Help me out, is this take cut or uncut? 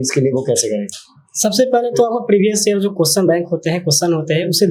uncut